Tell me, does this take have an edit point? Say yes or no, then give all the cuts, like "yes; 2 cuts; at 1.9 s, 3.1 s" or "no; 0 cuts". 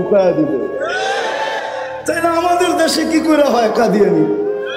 no; 0 cuts